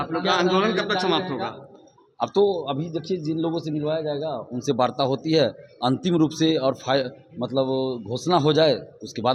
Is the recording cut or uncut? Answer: uncut